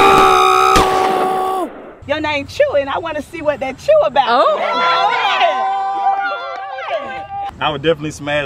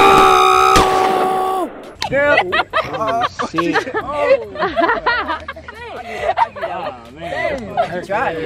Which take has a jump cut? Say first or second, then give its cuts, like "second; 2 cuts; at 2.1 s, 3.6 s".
first; 2 cuts; at 1.9 s, 7.5 s